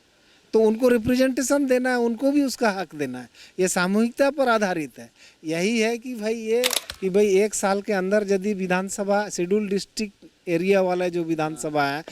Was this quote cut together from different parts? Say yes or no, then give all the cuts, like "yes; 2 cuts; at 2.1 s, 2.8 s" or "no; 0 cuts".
yes; 1 cut; at 6.8 s